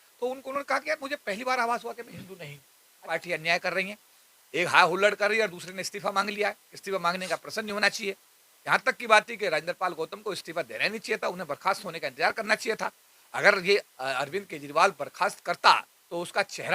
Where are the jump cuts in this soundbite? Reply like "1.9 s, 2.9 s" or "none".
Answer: 3.0 s